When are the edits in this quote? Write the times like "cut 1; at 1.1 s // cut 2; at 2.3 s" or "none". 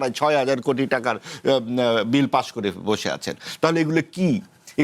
none